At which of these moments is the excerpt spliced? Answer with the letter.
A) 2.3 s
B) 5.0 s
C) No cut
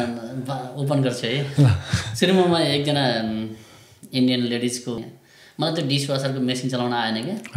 B